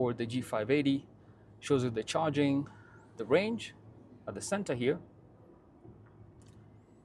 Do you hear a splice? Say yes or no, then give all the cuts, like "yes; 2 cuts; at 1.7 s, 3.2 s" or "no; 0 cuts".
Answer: no; 0 cuts